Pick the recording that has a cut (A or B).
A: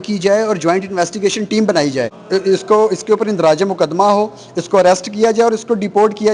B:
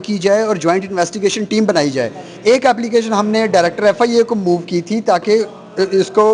A